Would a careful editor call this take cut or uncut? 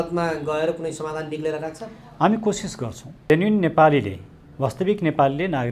cut